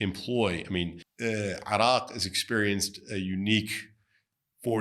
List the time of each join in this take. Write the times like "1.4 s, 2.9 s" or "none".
1.0 s